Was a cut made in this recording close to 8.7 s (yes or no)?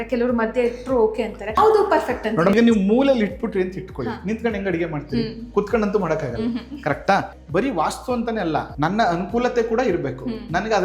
yes